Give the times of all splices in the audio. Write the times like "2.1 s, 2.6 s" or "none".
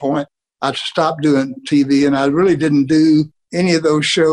none